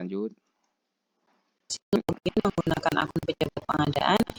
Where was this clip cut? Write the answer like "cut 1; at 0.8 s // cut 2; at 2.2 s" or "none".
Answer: none